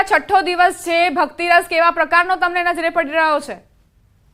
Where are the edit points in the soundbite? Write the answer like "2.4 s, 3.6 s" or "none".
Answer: 1.1 s